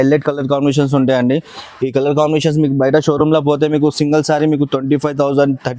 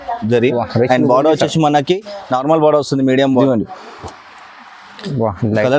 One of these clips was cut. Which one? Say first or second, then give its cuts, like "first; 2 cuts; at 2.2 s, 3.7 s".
second; 1 cut; at 3.4 s